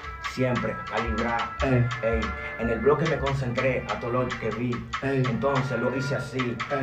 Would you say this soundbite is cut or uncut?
uncut